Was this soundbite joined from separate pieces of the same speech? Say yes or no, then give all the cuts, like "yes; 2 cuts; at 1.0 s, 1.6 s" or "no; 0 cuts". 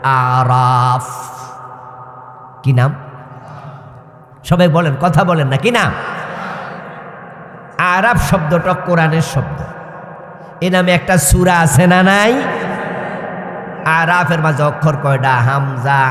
no; 0 cuts